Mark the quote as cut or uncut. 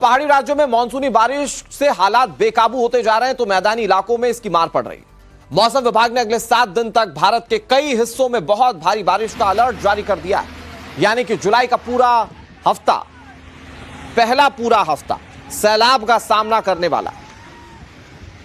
cut